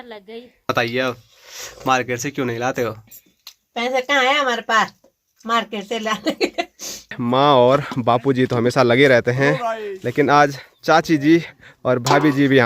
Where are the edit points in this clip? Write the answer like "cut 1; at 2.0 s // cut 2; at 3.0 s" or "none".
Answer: cut 1; at 0.7 s // cut 2; at 7.2 s